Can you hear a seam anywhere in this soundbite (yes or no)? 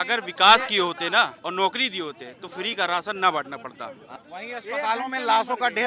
yes